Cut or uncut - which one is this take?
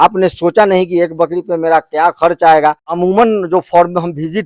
cut